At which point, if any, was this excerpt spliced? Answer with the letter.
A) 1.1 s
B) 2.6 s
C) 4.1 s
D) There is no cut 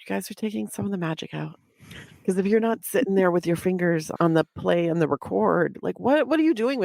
C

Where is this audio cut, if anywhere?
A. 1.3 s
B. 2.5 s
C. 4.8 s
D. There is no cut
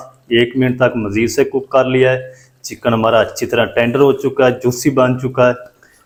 D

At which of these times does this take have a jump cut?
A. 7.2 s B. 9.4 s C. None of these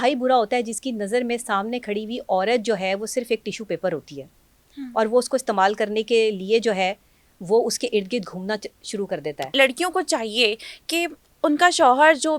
B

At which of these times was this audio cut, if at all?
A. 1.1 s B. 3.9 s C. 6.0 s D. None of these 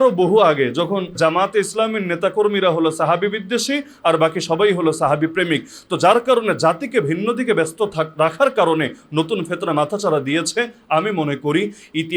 A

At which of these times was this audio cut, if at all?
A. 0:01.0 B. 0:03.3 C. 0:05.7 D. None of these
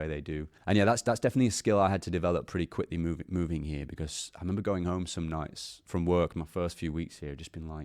A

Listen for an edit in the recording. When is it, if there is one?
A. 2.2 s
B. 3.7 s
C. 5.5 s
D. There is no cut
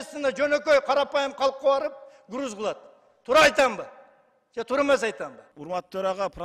C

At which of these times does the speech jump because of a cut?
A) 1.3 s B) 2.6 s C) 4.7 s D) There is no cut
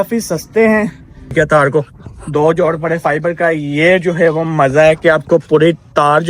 A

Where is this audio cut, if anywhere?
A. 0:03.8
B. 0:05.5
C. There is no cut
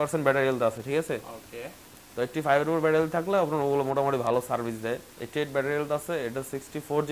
C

